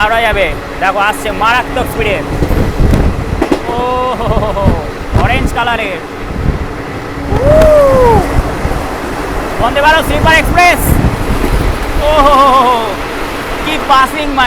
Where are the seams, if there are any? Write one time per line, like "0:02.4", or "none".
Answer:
none